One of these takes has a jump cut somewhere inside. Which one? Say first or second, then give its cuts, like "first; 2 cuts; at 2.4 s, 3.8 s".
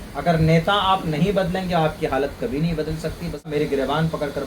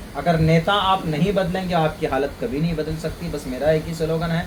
first; 1 cut; at 3.5 s